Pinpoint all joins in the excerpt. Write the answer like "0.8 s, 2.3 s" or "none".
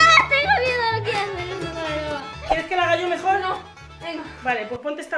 none